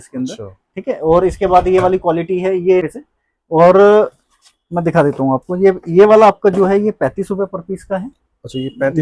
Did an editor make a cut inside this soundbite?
yes; 1 cut; at 3.0 s

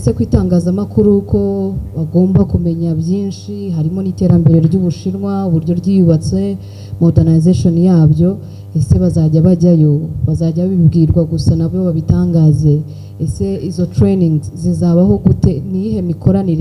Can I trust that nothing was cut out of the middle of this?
yes; 0 cuts

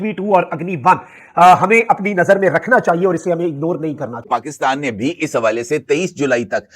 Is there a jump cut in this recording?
yes; 1 cut; at 4.3 s

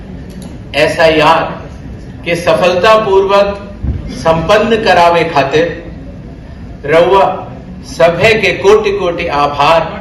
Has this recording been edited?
no; 0 cuts

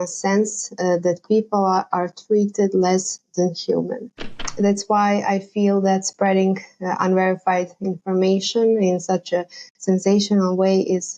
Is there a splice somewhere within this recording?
yes; 1 cut; at 4.4 s

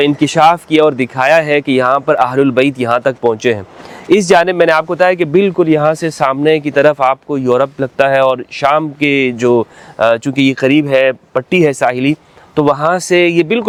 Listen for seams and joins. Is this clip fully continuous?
yes; 0 cuts

